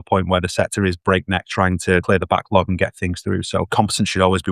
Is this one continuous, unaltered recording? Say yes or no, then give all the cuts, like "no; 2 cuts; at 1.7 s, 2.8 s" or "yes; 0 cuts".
no; 2 cuts; at 2.0 s, 3.7 s